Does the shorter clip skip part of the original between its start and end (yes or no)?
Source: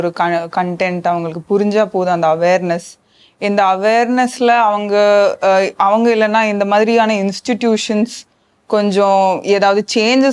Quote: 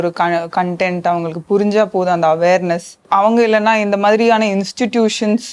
yes